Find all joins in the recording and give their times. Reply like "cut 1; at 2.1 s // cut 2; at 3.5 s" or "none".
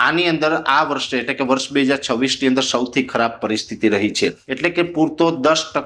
cut 1; at 4.5 s